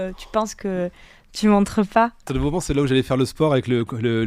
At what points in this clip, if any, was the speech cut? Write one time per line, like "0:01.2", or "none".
0:02.2